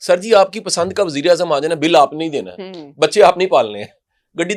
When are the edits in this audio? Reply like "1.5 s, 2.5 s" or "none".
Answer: none